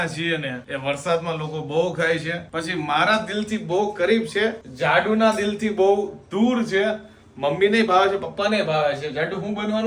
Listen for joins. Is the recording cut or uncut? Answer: uncut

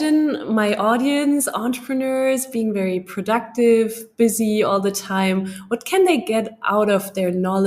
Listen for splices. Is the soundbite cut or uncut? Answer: uncut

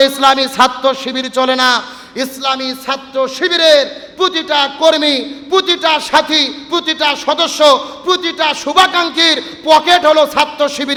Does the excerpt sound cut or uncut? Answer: uncut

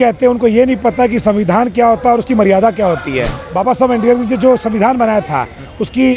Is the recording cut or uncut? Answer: cut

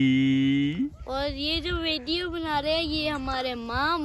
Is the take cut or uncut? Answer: uncut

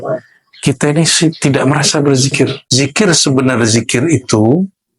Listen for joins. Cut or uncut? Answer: cut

